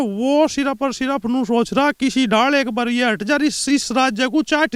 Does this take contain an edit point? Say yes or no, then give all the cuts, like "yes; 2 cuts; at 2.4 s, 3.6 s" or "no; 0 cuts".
no; 0 cuts